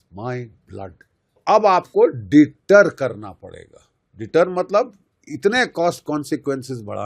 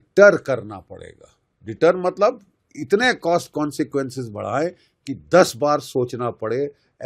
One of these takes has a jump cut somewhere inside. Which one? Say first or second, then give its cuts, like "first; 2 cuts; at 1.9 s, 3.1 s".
first; 1 cut; at 1.4 s